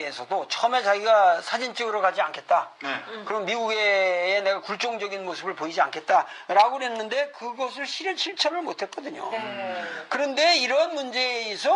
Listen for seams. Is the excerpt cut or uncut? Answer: cut